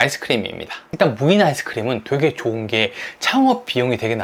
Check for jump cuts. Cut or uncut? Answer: uncut